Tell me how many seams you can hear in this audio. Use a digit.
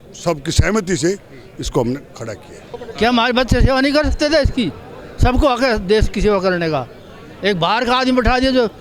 1